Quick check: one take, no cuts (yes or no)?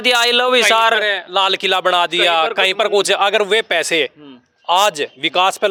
yes